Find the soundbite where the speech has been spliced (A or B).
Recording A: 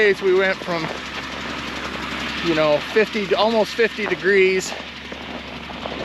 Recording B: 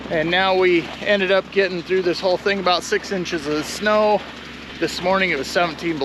B